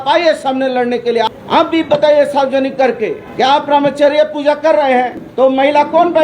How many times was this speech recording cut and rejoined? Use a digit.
3